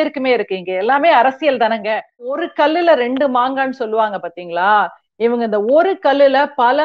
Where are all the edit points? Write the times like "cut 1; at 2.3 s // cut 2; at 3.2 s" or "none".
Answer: cut 1; at 2.4 s